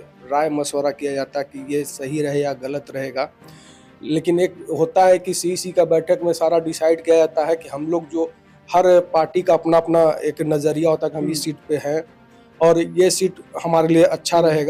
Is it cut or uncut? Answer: uncut